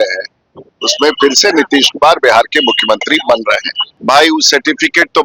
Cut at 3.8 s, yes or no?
yes